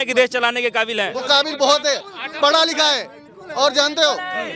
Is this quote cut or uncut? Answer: uncut